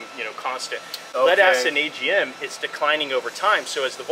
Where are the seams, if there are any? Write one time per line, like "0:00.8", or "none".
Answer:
none